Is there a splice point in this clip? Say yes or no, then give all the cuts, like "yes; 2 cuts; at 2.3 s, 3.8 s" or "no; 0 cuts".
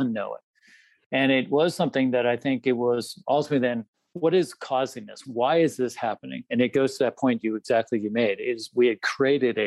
yes; 2 cuts; at 3.9 s, 5.2 s